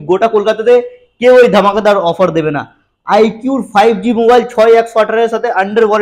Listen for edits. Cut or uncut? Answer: uncut